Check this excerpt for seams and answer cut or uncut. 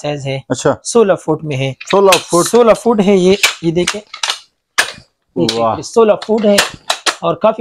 uncut